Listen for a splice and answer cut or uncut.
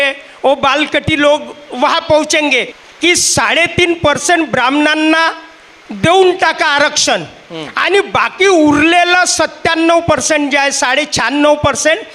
cut